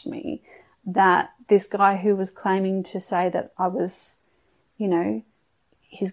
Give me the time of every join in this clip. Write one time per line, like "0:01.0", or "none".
none